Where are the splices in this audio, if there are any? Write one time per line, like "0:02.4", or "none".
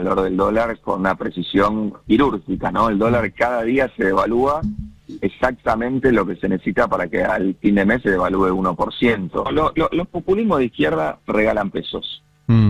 0:09.5